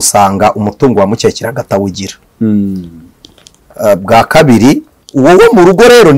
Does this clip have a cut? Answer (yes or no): yes